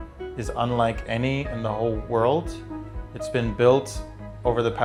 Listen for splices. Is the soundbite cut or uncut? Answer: uncut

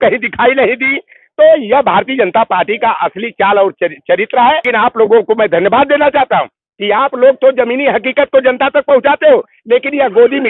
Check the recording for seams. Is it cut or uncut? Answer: cut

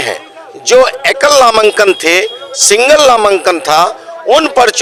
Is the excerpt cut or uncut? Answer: uncut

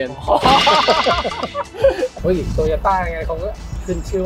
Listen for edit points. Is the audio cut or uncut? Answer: cut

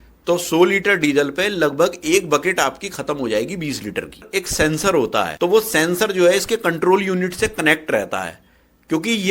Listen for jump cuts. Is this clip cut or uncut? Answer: cut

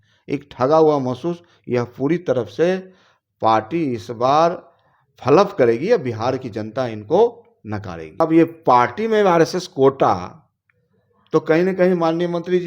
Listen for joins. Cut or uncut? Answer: cut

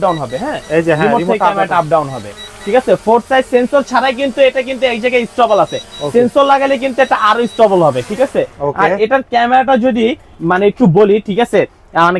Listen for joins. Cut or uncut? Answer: uncut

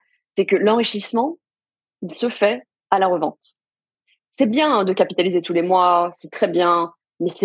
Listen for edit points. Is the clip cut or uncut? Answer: uncut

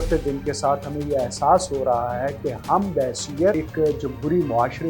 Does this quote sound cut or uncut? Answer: cut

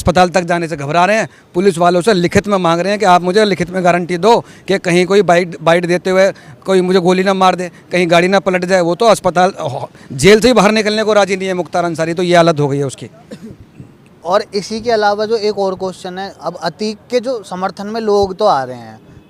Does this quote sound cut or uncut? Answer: uncut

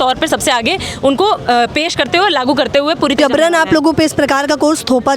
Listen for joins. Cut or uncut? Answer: cut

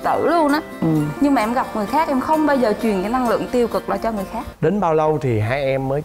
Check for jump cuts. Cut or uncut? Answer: cut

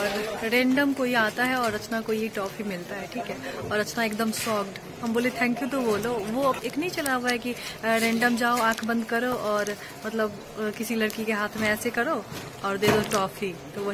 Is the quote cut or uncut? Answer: uncut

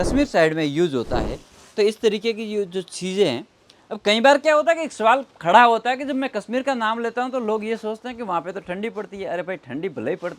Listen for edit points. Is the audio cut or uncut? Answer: uncut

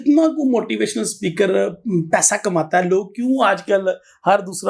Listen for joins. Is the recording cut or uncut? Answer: uncut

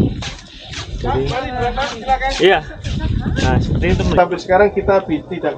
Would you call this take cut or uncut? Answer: cut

